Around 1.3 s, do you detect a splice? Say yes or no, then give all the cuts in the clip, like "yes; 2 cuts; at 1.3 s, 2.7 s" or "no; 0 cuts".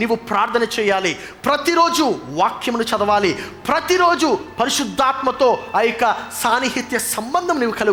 no; 0 cuts